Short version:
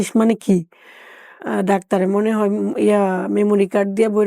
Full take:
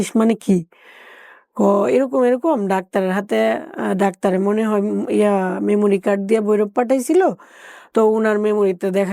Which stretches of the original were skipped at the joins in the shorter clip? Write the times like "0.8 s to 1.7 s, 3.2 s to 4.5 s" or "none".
1.4 s to 3.7 s